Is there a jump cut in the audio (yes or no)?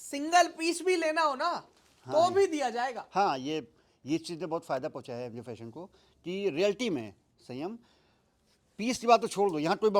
no